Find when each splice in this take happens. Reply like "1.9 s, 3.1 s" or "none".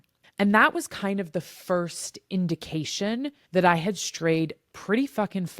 3.4 s